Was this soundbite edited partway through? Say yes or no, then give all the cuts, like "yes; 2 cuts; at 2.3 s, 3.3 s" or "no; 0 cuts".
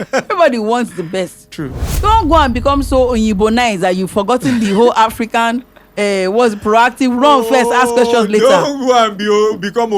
yes; 1 cut; at 1.8 s